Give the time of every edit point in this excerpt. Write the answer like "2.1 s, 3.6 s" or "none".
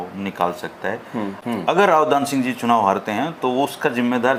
none